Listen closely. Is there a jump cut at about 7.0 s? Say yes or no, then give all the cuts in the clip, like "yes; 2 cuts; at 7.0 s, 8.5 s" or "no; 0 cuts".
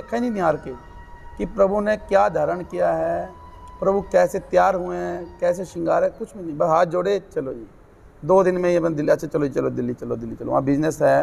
no; 0 cuts